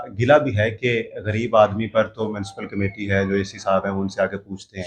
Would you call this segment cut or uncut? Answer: uncut